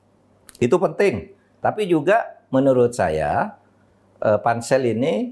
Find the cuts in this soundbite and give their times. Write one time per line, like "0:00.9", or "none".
0:01.6

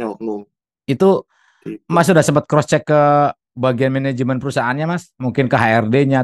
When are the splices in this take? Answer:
none

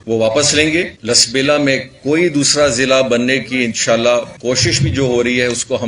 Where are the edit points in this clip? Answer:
0:00.9
0:04.3

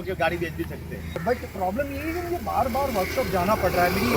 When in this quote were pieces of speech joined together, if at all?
none

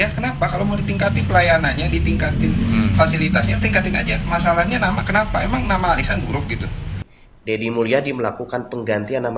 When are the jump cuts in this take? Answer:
0:07.1

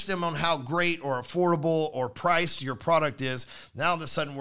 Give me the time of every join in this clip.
none

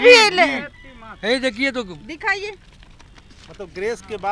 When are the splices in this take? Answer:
none

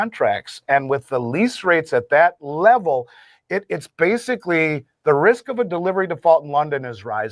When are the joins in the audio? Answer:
none

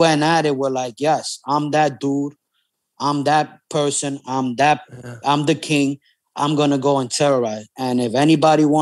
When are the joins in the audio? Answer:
none

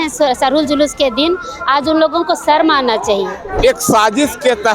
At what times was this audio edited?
0:03.4

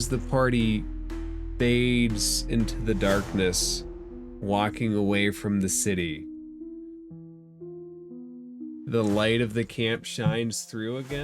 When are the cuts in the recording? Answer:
0:06.1
0:08.9

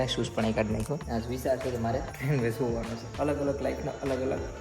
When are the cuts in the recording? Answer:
0:01.0
0:02.1
0:03.0

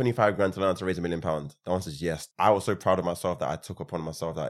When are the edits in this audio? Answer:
0:02.2

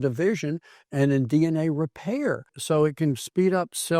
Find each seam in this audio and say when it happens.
0:02.5

